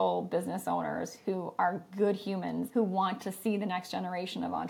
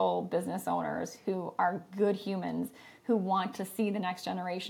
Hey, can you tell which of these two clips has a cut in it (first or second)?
first